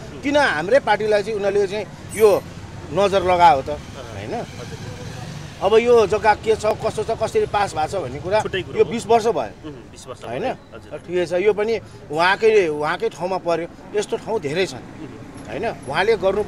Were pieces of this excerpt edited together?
no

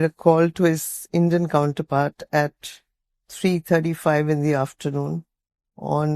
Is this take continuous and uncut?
yes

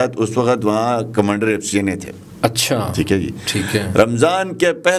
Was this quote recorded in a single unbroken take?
yes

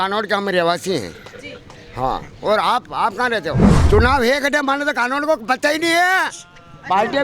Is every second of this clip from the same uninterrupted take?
no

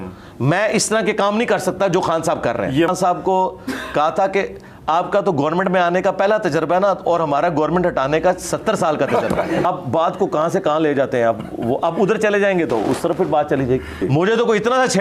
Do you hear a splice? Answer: yes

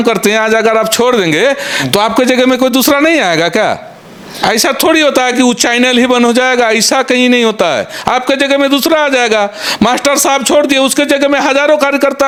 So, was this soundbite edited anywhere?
no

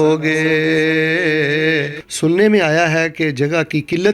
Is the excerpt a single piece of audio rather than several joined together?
no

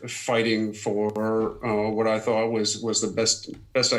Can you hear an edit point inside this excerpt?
no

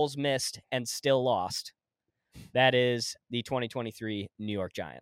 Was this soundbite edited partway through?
no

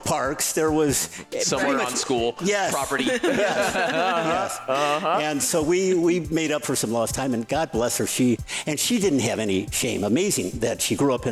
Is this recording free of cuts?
yes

